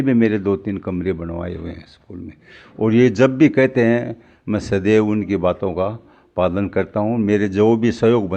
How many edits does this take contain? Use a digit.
0